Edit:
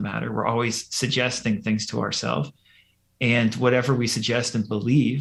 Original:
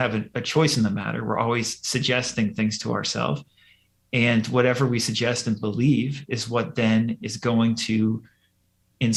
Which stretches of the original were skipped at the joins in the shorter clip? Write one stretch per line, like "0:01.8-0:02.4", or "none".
none